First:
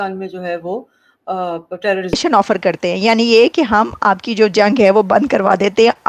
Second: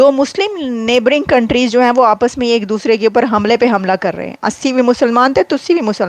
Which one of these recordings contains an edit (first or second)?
first